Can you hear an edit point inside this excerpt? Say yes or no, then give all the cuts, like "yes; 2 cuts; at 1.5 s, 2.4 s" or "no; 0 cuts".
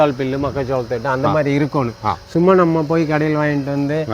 no; 0 cuts